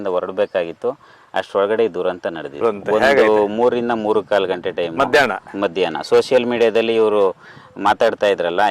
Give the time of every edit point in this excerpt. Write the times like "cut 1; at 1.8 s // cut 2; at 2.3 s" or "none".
cut 1; at 2.5 s